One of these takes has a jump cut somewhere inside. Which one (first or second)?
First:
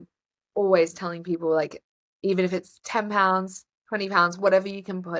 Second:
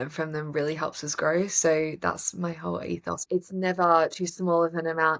second